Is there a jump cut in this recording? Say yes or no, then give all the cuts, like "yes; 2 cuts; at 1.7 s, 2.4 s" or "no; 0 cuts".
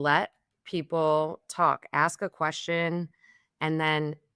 no; 0 cuts